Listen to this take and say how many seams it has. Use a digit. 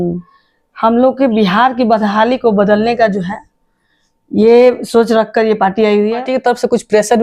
1